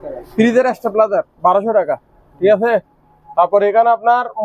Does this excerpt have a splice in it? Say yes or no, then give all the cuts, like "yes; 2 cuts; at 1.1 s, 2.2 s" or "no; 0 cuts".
no; 0 cuts